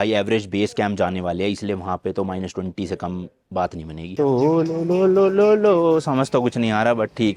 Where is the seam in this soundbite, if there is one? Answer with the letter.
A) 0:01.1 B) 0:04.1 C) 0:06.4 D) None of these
B